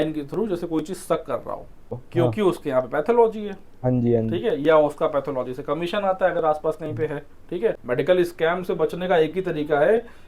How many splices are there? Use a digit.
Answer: 2